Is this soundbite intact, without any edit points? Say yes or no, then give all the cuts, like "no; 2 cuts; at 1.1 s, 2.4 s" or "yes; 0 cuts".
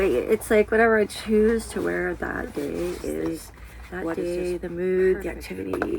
no; 1 cut; at 4.1 s